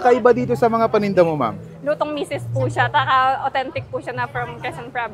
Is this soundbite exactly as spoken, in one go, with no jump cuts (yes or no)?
yes